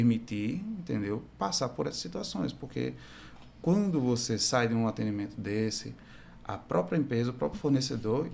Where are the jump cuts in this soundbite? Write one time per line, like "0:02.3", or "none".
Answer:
none